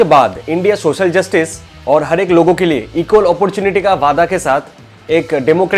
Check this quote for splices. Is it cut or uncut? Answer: uncut